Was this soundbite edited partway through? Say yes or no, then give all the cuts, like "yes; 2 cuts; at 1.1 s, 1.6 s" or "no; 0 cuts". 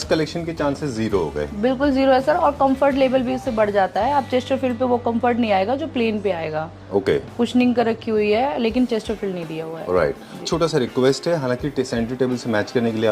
yes; 1 cut; at 10.5 s